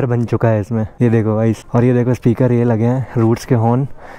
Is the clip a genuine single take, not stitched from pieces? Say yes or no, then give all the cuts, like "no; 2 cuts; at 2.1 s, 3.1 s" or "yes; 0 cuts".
yes; 0 cuts